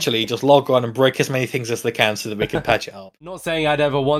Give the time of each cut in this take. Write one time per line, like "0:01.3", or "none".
0:03.3